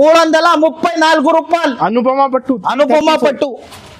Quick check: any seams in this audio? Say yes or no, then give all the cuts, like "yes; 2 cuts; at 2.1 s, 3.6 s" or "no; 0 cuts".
no; 0 cuts